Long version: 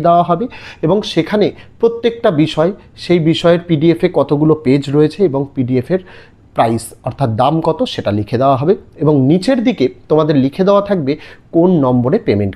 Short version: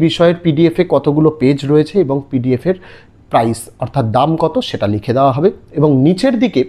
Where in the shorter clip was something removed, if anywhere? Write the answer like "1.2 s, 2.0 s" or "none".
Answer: none

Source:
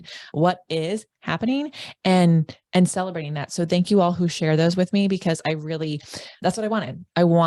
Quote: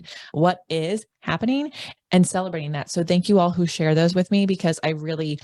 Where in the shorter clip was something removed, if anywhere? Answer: 1.9 s

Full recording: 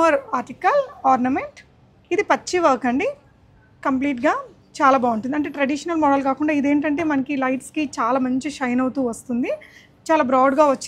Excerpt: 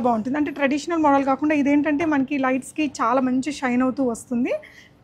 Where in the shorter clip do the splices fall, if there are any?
none

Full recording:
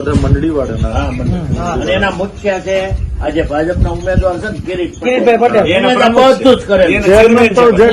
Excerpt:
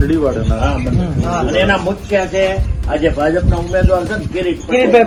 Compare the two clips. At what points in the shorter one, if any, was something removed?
none

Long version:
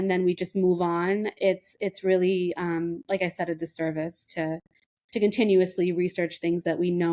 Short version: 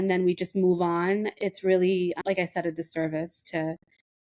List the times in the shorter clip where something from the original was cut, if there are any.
1.3 s, 2.2 s

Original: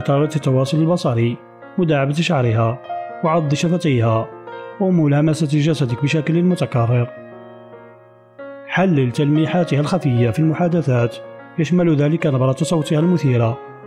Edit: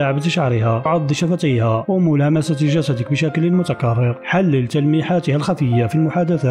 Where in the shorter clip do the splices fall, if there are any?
0.8 s, 1.8 s, 4.2 s

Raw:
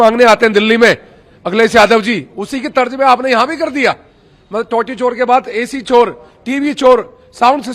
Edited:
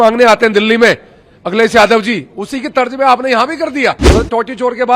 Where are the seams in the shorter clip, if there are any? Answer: 4.0 s

